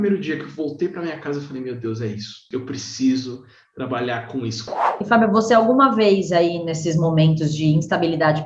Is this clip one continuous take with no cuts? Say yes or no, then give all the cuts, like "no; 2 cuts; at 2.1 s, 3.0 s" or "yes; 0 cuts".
no; 2 cuts; at 2.4 s, 4.8 s